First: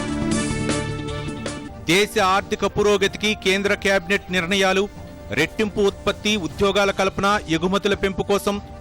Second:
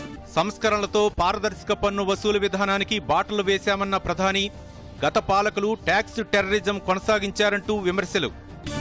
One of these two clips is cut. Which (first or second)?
first